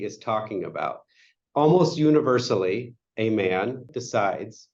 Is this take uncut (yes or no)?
no